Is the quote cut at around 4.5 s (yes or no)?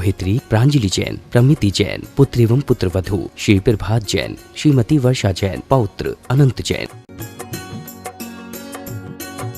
no